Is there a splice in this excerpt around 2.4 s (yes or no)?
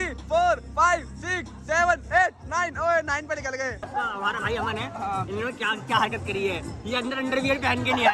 no